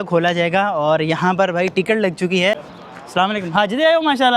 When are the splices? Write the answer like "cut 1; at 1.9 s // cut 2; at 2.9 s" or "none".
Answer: cut 1; at 2.6 s